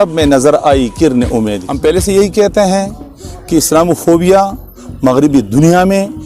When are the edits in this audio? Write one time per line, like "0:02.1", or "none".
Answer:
0:01.6

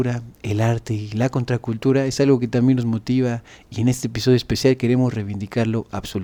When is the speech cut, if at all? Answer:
none

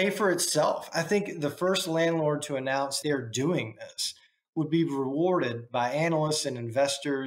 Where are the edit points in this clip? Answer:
0:03.0

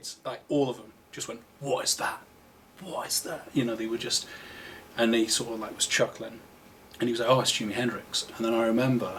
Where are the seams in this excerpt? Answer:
none

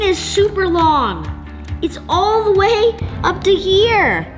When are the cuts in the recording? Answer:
none

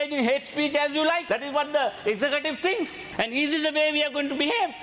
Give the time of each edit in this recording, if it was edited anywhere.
0:01.2
0:03.0

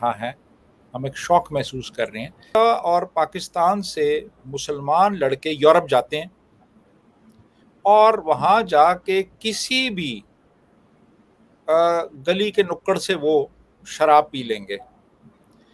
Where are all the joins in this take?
0:02.5

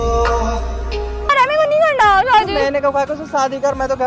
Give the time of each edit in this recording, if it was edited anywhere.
0:01.3

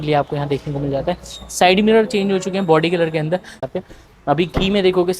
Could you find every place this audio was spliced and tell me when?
0:03.6

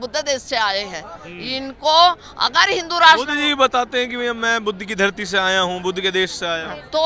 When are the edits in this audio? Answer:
none

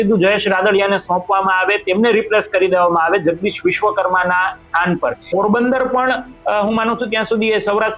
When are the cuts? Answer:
0:05.3

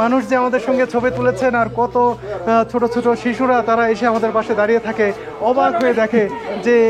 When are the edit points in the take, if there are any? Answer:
none

